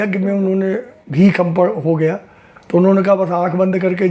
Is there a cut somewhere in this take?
no; 0 cuts

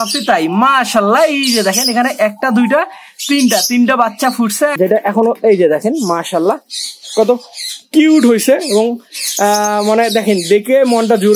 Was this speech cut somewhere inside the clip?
yes; 1 cut; at 4.7 s

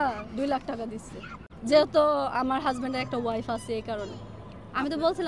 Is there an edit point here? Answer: no; 0 cuts

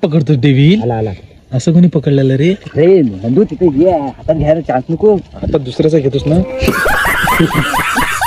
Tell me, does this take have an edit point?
no; 0 cuts

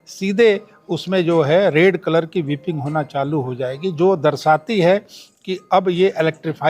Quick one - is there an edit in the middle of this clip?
no; 0 cuts

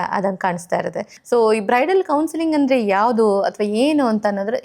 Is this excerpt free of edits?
no; 1 cut; at 1.1 s

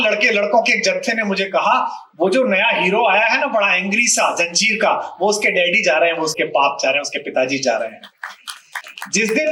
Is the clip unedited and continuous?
yes; 0 cuts

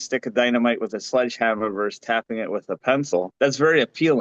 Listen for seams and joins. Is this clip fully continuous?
no; 1 cut; at 3.3 s

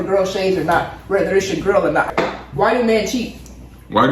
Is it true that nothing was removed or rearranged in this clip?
no; 1 cut; at 2.1 s

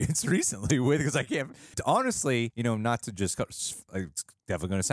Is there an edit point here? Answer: yes; 3 cuts; at 1.7 s, 2.5 s, 3.9 s

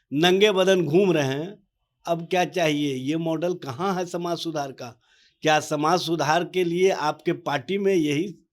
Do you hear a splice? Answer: no; 0 cuts

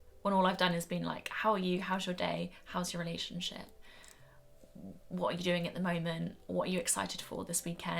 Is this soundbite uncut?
yes; 0 cuts

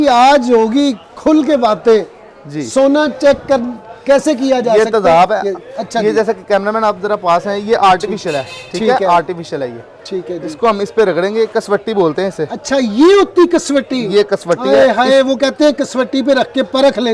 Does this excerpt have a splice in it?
no; 0 cuts

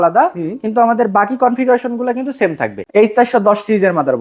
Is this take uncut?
no; 1 cut; at 2.8 s

